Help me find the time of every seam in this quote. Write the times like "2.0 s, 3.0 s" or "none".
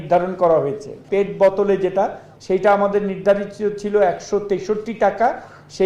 1.0 s, 2.3 s